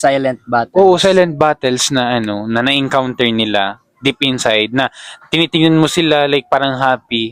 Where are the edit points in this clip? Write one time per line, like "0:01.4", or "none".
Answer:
none